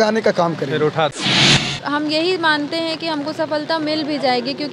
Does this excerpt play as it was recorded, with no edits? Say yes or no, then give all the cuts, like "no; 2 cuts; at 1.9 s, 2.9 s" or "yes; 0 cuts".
no; 1 cut; at 1.5 s